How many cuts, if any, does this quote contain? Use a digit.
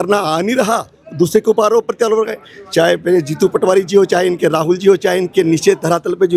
0